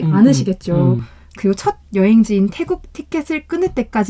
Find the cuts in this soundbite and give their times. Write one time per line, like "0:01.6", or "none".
0:01.0